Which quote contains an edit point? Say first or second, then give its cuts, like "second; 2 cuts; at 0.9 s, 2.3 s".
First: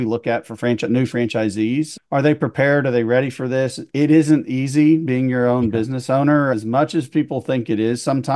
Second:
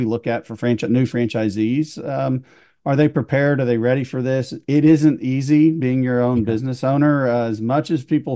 first; 2 cuts; at 2.0 s, 6.5 s